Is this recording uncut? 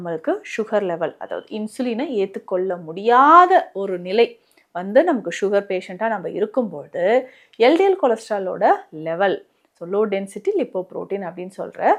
yes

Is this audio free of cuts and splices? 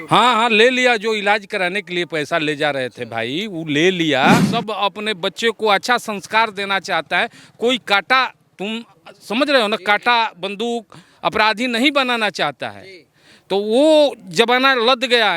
no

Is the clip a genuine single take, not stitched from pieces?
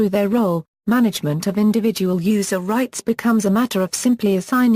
no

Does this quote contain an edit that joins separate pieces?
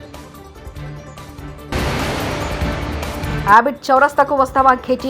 yes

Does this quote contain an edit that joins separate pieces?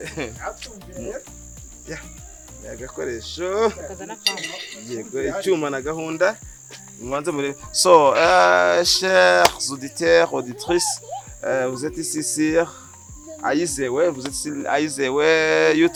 no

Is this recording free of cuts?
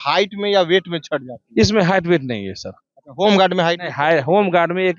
yes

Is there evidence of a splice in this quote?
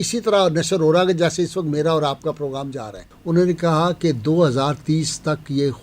yes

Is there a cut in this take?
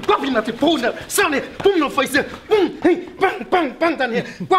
no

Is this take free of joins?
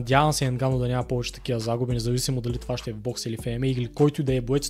yes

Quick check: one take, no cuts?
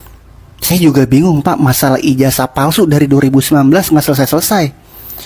yes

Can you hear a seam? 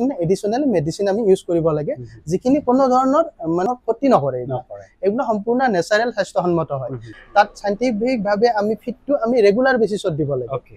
yes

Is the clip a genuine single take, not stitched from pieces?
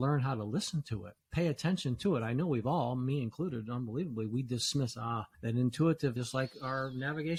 yes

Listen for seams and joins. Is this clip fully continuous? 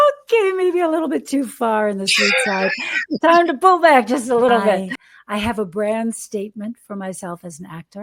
no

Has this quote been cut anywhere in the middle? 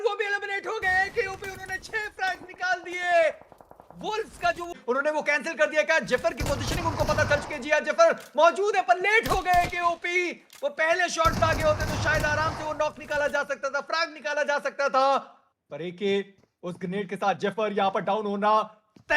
yes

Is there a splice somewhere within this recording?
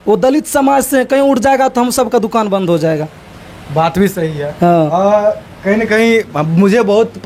no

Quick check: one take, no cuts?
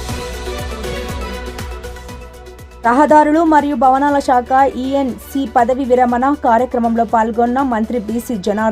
no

